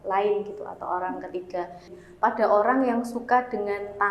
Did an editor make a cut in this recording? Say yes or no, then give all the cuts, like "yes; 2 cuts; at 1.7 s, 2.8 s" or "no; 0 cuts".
yes; 1 cut; at 2.0 s